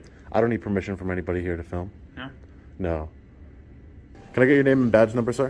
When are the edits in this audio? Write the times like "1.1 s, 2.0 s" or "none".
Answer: 3.8 s